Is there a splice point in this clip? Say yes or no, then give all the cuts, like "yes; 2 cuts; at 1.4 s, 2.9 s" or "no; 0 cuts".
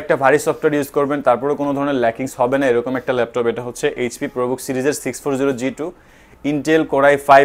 no; 0 cuts